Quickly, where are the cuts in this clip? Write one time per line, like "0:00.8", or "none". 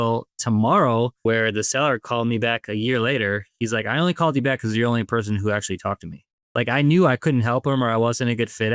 0:01.2
0:06.4

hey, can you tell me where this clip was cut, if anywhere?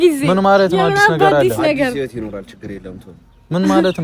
none

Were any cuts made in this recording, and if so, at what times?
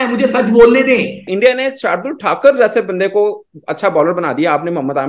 0:01.3

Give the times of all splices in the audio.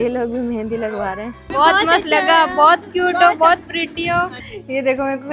0:01.4
0:04.4

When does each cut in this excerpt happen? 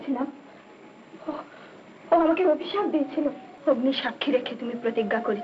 0:03.5

